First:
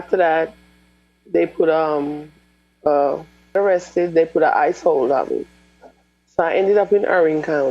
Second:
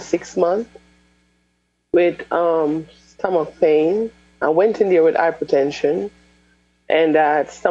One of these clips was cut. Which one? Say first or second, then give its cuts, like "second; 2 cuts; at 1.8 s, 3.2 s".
first; 1 cut; at 3.5 s